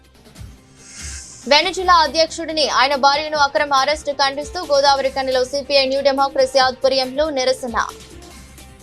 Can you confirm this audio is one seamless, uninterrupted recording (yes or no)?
yes